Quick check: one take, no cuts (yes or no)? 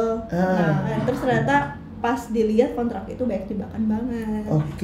no